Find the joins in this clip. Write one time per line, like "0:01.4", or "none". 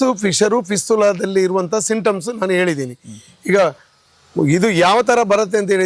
none